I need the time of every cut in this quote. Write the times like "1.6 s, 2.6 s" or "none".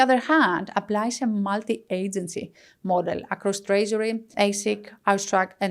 4.2 s